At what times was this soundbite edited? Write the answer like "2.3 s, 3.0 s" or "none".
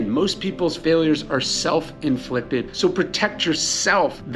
2.7 s